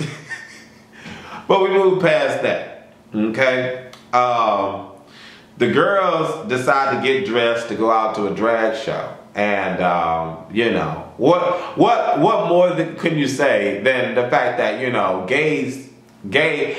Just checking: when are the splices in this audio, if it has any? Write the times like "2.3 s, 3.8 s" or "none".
none

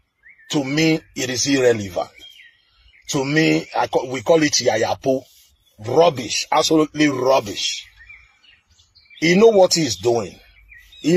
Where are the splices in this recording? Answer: none

